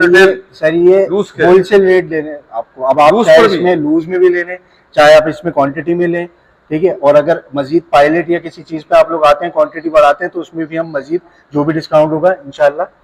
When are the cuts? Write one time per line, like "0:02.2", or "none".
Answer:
none